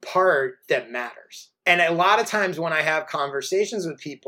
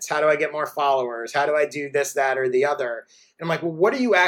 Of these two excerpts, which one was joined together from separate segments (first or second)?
first